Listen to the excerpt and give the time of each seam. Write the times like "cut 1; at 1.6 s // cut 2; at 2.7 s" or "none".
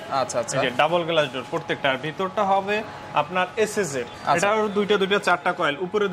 cut 1; at 4.2 s